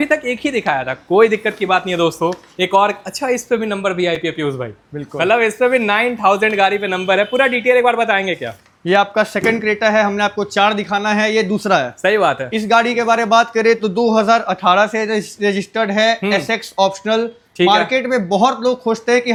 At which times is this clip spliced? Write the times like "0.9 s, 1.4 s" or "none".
none